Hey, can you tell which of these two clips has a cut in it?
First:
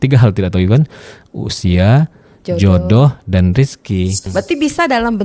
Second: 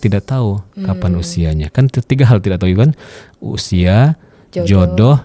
first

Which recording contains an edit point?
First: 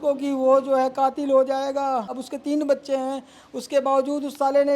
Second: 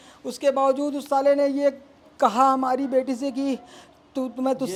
first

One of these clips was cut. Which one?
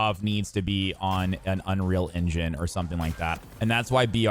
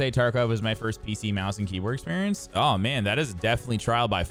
first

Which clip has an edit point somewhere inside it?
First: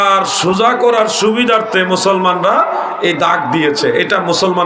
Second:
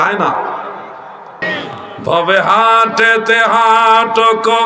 second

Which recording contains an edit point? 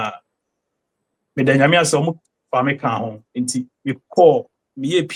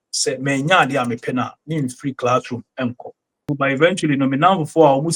second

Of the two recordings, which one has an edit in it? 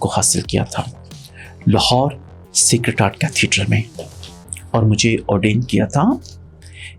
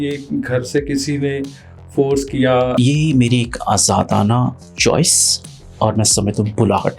second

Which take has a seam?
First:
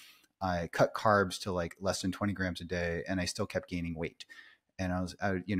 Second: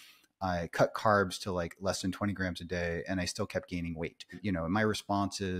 second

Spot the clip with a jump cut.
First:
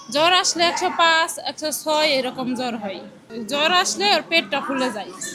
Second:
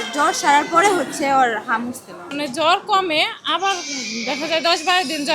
second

